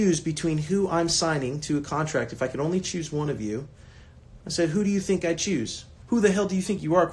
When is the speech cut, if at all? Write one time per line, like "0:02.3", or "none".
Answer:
0:05.9